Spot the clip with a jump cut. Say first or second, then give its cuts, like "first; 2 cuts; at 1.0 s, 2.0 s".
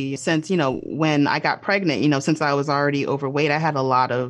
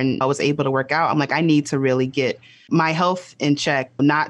second; 1 cut; at 2.5 s